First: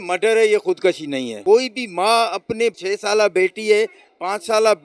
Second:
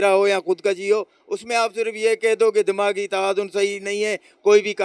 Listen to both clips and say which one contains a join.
first; 2 cuts; at 1.3 s, 2.8 s

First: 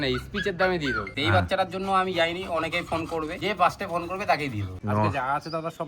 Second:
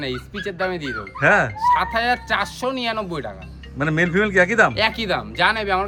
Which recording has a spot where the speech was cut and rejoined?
first; 3 cuts; at 1.1 s, 3.4 s, 4.7 s

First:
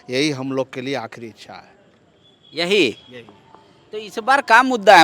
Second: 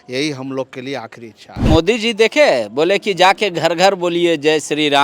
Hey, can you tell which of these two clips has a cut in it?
second; 1 cut; at 1.7 s

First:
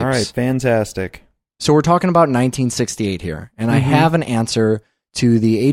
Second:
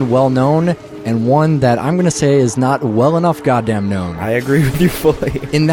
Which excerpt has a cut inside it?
first; 1 cut; at 2.1 s

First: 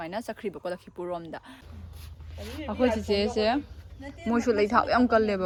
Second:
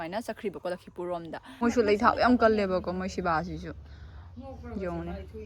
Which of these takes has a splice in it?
second; 1 cut; at 1.6 s

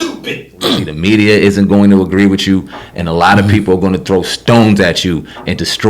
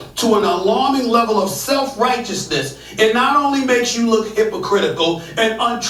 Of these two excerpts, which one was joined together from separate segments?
first; 1 cut; at 0.9 s

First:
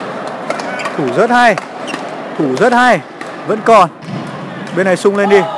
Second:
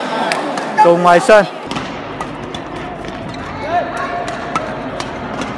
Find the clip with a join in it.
second; 1 cut; at 1.6 s

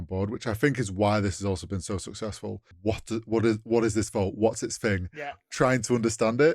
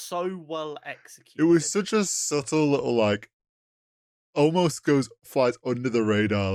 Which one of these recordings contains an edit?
first; 1 cut; at 2.7 s

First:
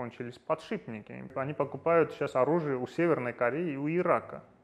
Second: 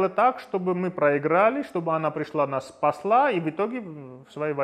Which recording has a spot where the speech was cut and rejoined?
first; 1 cut; at 1.3 s

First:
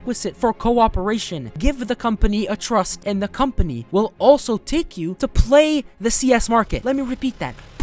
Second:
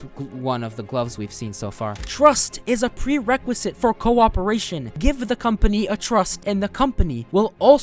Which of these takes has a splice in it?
second; 1 cut; at 2.0 s

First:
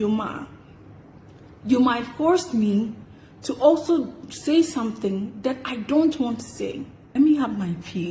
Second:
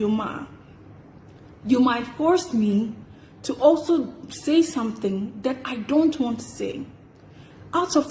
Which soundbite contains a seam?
first; 1 cut; at 6.9 s

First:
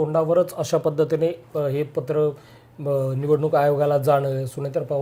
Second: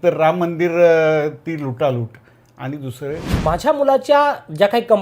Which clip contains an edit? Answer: second; 1 cut; at 3.3 s

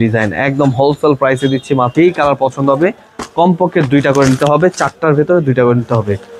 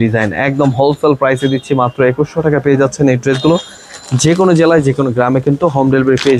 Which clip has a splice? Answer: first; 1 cut; at 1.9 s

